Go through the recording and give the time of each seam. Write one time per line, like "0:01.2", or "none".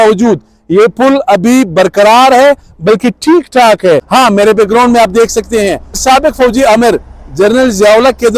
0:04.1
0:06.0